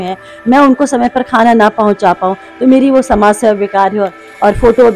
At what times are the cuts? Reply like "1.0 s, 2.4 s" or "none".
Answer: none